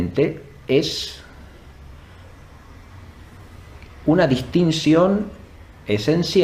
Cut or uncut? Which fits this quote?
uncut